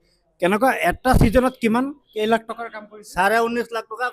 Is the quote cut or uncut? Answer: uncut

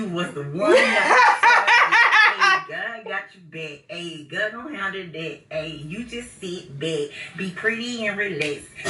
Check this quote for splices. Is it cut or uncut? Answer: uncut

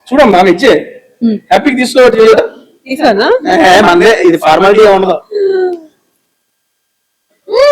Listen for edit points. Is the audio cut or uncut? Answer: uncut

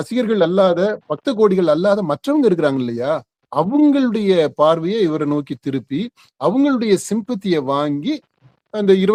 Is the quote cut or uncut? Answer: uncut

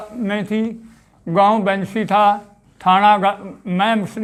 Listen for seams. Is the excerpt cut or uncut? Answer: uncut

